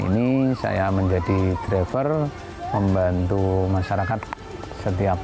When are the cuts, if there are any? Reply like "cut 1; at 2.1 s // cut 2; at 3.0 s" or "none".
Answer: none